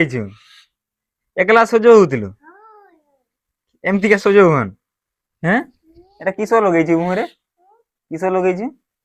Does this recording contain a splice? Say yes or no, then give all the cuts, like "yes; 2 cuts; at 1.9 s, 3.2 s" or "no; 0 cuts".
no; 0 cuts